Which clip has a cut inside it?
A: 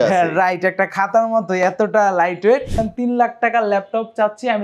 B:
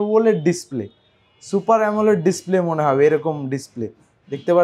A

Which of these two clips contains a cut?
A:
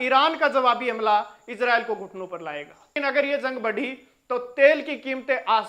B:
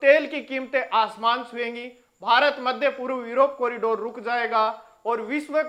A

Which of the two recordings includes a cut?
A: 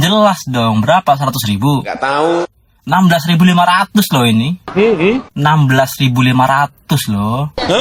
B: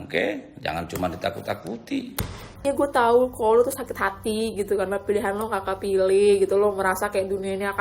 B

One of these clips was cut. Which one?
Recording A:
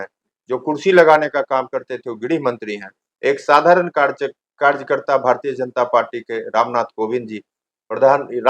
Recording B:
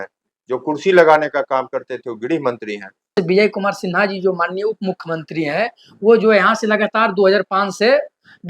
B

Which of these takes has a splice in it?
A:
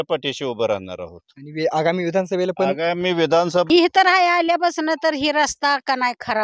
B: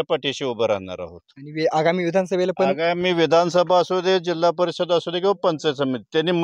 A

